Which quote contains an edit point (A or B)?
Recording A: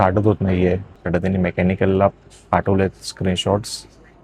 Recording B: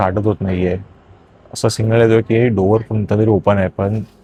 A